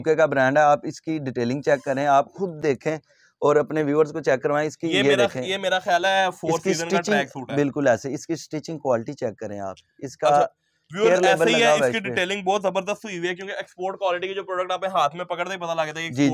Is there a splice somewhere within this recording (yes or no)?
no